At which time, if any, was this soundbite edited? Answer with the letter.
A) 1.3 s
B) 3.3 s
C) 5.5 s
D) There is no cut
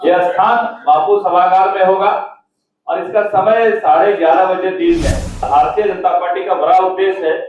C